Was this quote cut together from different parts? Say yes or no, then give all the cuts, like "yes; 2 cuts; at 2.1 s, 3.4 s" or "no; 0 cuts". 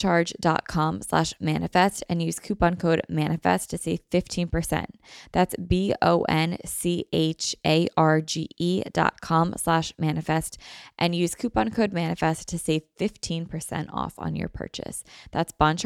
no; 0 cuts